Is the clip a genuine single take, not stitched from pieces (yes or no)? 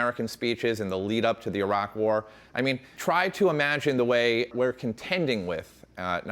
no